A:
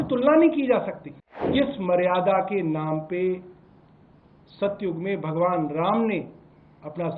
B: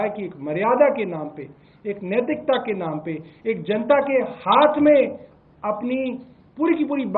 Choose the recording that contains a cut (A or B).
A